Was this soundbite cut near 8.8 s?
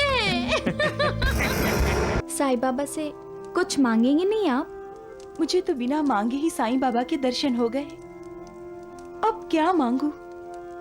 no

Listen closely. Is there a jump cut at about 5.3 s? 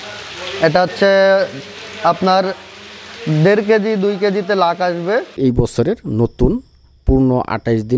yes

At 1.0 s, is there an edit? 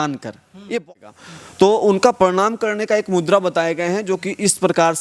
yes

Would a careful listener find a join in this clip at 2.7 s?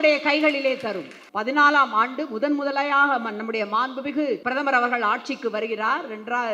no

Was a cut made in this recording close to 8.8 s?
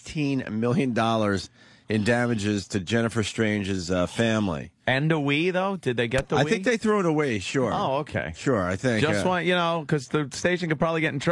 yes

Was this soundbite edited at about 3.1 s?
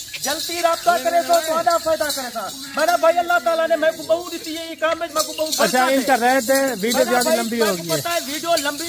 no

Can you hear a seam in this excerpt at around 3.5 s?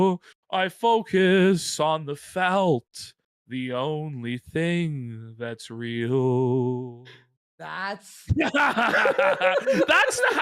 no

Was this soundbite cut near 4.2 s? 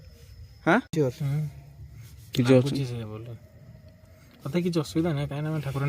no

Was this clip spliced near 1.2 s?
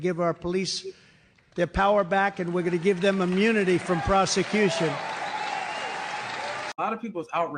no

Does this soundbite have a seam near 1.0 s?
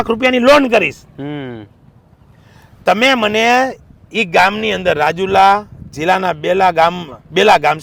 no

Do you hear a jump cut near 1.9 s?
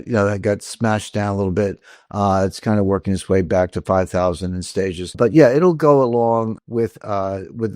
no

